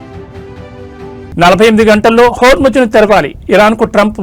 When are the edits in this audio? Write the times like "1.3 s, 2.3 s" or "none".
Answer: 1.2 s